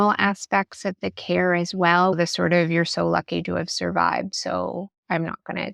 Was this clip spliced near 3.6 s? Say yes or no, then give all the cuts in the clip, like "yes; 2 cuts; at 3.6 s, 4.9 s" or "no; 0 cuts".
no; 1 cut; at 2.1 s